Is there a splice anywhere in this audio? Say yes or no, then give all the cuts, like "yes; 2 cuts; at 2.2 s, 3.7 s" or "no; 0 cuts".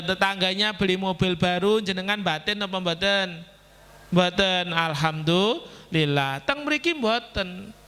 no; 0 cuts